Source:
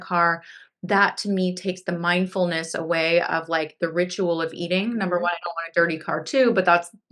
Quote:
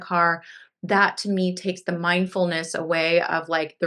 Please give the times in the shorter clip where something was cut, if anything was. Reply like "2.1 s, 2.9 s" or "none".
none